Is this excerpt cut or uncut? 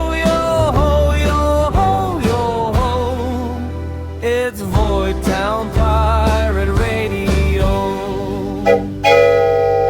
cut